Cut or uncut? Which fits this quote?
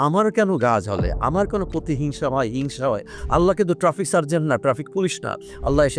cut